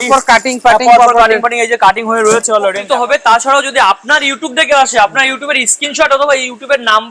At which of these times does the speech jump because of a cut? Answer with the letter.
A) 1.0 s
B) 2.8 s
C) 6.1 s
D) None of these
B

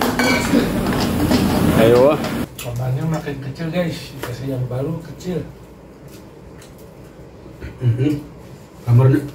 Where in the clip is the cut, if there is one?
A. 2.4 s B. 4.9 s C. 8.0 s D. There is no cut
A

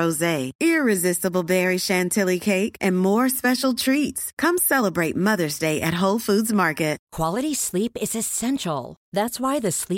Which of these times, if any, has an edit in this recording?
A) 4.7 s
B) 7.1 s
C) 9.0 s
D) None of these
B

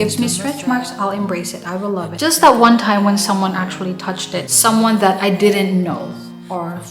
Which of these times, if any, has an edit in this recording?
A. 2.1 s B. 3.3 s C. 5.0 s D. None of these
A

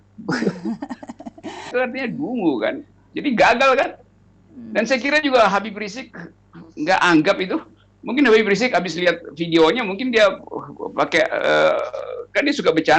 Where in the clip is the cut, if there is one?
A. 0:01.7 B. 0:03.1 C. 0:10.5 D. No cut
A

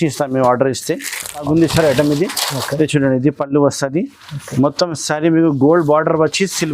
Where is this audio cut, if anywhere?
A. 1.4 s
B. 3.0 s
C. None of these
A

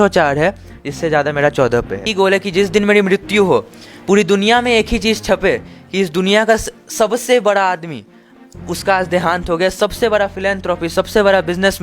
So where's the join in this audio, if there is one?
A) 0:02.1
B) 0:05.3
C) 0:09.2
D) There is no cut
A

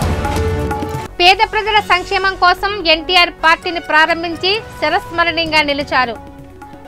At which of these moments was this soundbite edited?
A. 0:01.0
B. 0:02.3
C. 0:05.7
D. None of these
A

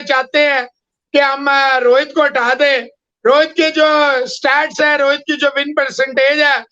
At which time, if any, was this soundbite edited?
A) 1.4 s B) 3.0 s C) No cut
C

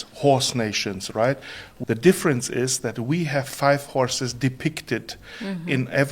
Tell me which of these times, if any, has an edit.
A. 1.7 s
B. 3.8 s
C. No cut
A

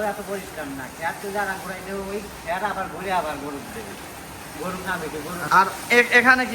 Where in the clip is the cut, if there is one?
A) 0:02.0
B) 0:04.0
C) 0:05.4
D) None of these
C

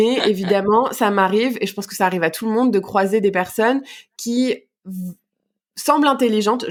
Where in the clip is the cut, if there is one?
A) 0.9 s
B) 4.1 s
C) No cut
C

